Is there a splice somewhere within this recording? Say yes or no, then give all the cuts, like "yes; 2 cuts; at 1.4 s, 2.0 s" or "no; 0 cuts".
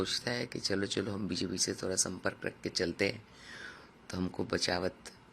no; 0 cuts